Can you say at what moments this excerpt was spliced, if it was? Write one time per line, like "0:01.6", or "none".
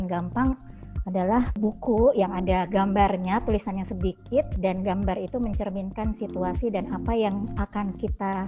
none

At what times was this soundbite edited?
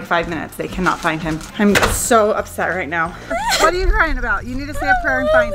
0:01.4
0:03.2

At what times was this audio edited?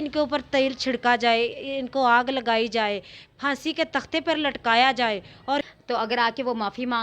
0:05.6

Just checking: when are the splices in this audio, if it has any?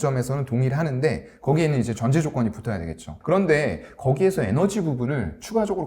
0:03.1

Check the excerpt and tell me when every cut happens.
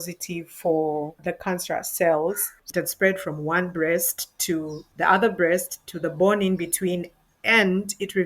0:01.2
0:02.5
0:04.8

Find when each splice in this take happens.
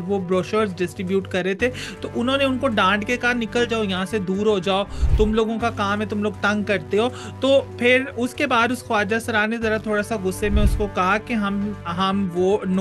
none

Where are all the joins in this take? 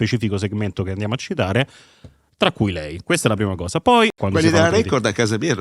0:04.1

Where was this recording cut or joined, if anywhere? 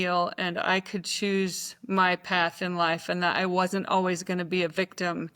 none

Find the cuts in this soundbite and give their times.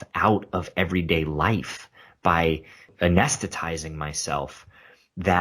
0:02.9

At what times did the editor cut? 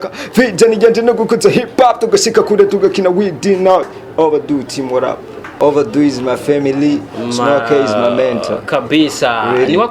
0:05.5

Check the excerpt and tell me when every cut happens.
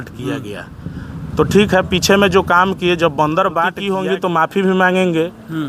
0:03.9

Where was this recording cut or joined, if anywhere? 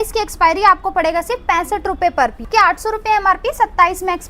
0:02.5

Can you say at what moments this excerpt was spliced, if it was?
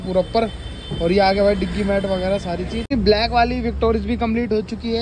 0:02.9

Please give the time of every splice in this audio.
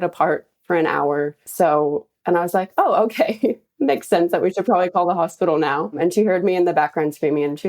0:01.4
0:06.0

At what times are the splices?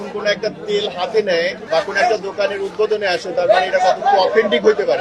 none

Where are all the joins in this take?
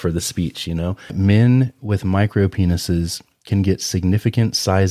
0:01.1

